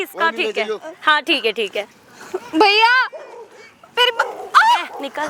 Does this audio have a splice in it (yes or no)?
no